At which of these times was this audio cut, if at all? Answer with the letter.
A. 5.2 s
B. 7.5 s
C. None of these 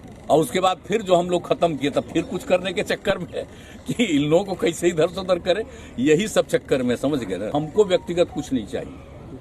B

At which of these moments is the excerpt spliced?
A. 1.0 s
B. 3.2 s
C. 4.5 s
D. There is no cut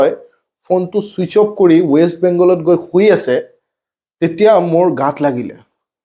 D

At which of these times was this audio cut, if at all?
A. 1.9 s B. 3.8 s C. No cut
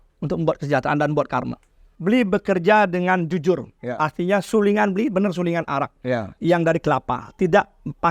A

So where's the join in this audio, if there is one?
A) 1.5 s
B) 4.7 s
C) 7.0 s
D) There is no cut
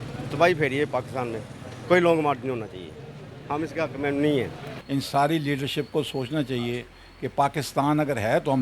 B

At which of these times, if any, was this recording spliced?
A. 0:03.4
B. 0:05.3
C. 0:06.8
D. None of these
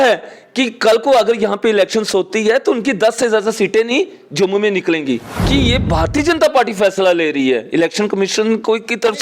B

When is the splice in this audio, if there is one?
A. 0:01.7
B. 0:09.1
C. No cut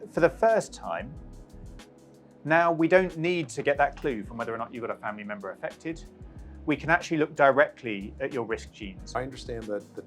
B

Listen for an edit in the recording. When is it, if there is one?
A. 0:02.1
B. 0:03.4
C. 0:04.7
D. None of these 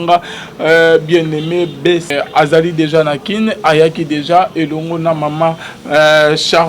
A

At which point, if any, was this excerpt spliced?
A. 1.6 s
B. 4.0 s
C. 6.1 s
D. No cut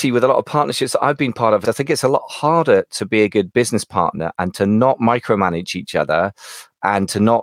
A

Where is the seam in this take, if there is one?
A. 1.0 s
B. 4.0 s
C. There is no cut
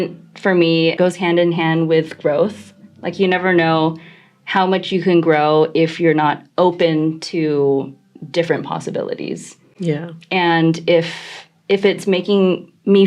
A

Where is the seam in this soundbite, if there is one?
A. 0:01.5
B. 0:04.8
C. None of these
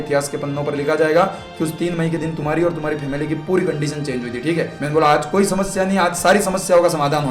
B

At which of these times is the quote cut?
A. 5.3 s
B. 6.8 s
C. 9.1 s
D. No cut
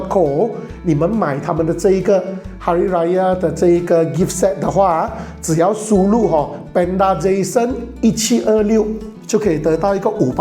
C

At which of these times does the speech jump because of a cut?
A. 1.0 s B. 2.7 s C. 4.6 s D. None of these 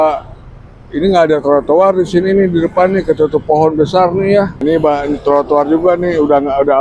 C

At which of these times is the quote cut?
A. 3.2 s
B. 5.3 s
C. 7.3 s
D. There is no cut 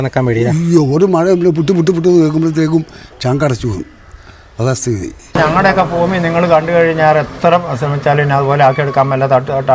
B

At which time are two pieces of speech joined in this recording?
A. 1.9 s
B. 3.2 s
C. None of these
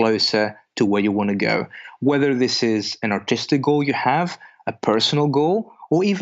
C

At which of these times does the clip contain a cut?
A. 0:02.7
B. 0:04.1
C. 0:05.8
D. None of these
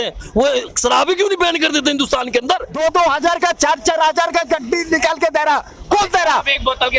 A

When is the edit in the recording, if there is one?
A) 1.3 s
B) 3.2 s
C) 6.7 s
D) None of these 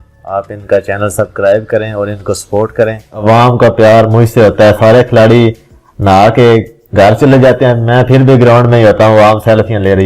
B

